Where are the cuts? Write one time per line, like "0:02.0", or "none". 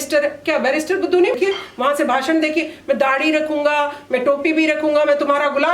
0:01.3